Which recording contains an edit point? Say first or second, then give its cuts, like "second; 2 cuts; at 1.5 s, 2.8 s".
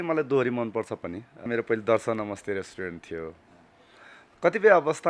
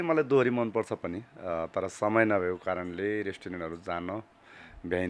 first; 1 cut; at 1.5 s